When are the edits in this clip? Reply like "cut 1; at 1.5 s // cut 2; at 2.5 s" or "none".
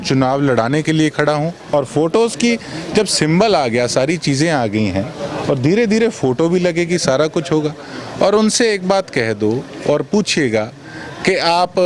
cut 1; at 1.7 s